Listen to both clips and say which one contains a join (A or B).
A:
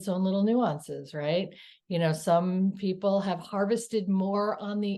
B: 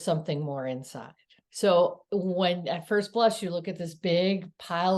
B